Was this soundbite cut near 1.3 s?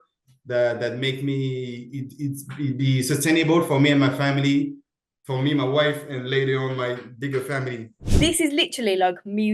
no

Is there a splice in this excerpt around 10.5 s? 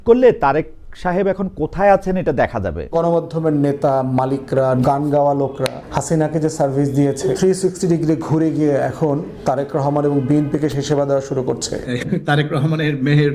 no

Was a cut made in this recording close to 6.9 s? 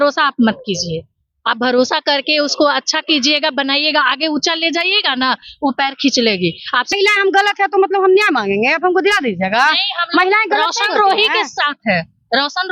yes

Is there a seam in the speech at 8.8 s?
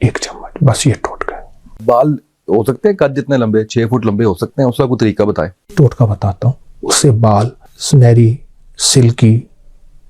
no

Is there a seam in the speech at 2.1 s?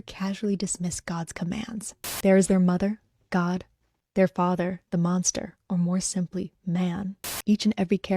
yes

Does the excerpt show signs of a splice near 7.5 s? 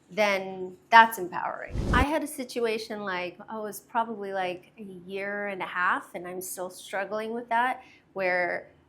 no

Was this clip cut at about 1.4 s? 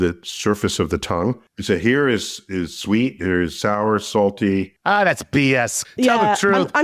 yes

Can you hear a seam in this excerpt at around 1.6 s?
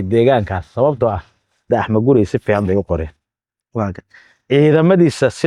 yes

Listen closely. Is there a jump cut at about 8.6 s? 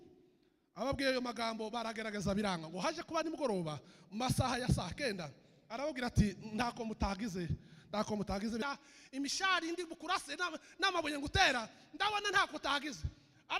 yes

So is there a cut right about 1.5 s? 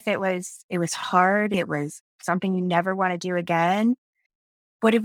yes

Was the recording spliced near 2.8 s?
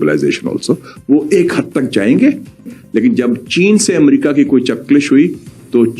yes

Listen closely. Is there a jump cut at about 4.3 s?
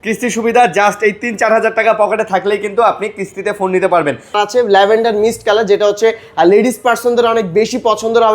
yes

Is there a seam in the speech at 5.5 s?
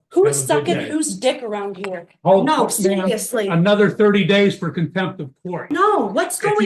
yes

